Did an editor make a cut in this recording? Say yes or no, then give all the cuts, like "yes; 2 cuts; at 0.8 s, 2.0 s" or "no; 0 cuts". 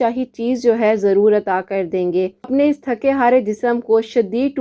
yes; 1 cut; at 2.5 s